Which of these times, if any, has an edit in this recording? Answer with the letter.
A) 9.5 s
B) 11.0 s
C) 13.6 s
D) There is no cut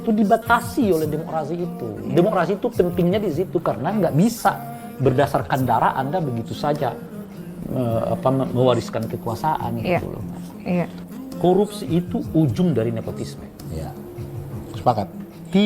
B